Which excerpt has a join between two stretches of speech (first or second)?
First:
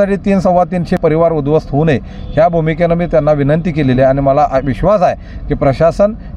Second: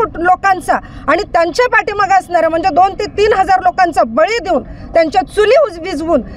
first